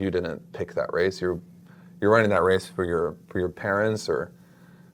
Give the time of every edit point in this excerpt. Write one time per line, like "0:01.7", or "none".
none